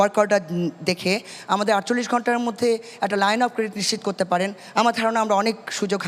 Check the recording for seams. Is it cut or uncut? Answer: uncut